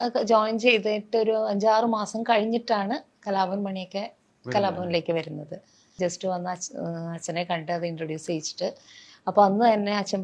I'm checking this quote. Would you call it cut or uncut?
cut